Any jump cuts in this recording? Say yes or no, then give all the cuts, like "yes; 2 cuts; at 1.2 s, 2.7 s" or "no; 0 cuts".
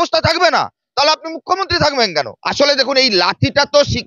yes; 1 cut; at 2.4 s